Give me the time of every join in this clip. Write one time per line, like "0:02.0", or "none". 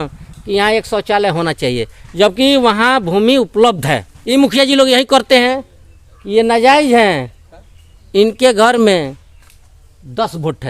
0:04.1